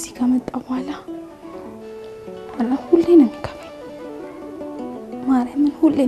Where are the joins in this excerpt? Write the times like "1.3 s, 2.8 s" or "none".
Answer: 1.0 s, 2.5 s, 3.4 s, 5.3 s